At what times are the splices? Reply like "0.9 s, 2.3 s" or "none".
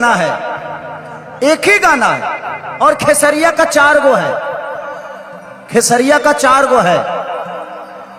none